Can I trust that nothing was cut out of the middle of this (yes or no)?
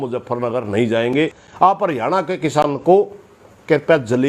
no